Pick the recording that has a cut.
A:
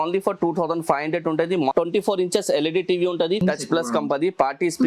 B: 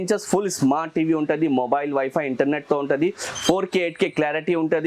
A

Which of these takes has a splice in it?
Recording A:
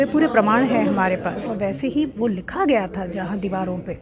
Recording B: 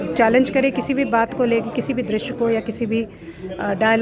A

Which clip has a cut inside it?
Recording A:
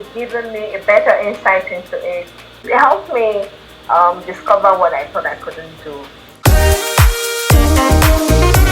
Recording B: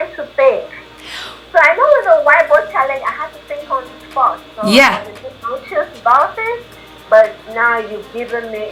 A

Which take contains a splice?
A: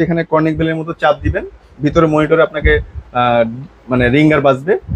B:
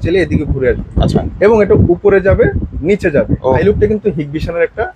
B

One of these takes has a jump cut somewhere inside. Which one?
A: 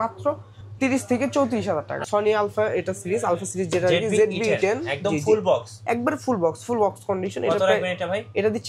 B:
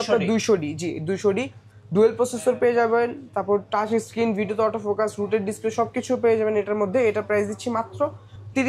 A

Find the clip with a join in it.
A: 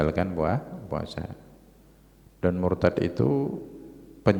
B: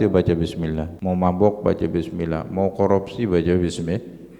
B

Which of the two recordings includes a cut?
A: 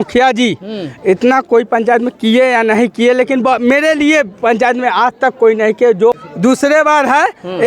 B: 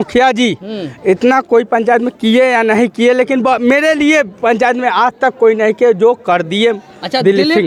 A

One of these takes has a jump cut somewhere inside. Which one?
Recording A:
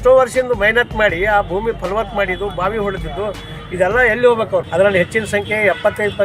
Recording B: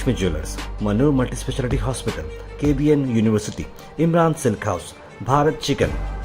A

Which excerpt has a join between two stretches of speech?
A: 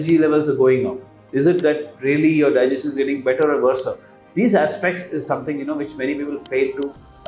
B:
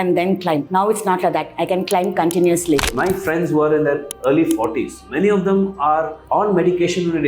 B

